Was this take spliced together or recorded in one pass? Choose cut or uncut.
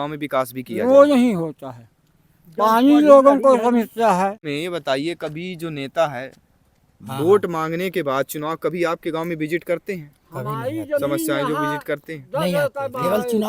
cut